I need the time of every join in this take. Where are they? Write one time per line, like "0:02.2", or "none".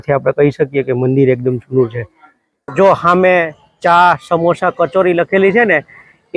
0:02.7